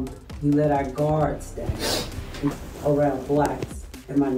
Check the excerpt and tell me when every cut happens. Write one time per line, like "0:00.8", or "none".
0:02.5